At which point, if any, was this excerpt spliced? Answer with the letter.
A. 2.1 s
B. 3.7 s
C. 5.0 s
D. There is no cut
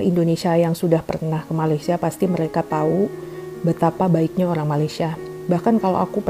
D